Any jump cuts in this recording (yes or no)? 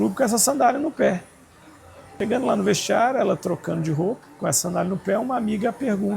yes